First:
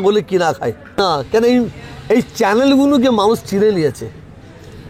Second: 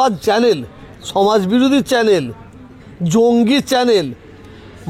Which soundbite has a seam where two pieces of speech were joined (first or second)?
first